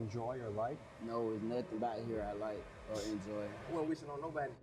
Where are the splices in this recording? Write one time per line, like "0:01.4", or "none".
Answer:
0:03.6